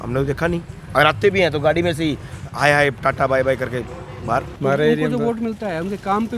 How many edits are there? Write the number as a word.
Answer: one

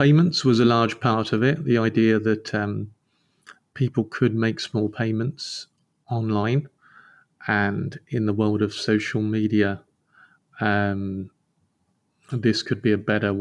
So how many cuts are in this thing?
zero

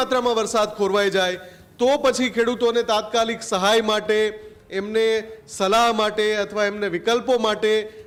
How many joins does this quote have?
zero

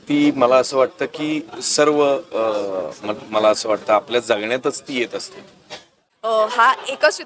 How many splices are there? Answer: one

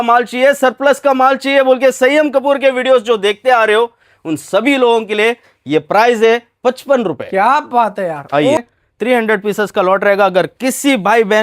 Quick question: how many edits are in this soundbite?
one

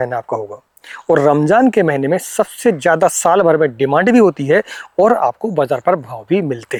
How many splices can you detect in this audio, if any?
zero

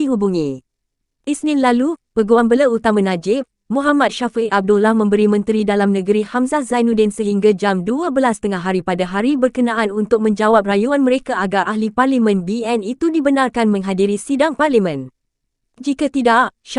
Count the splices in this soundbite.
one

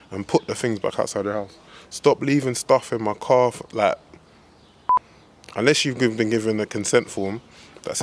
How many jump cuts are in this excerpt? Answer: one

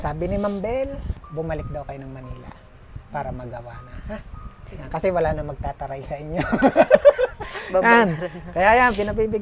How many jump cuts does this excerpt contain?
one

